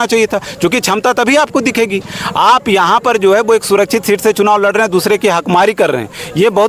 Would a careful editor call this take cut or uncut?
uncut